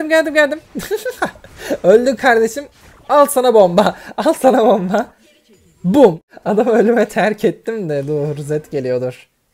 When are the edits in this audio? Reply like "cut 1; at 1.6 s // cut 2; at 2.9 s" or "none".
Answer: cut 1; at 6.3 s